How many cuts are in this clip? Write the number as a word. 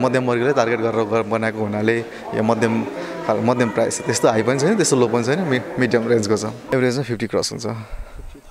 one